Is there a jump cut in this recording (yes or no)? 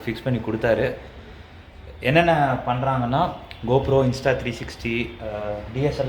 no